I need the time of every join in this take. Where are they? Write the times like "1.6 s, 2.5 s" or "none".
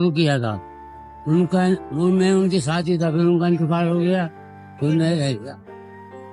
none